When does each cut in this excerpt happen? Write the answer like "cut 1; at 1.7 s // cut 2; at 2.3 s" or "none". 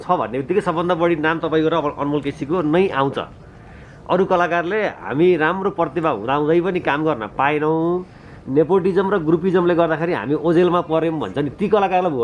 none